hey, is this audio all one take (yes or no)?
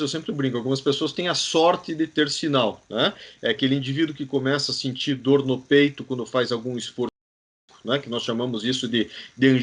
yes